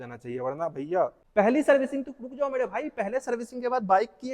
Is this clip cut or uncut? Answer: cut